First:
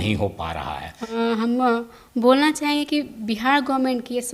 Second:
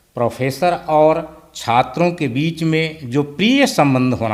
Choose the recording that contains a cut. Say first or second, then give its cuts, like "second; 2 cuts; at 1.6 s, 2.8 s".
first; 1 cut; at 1.1 s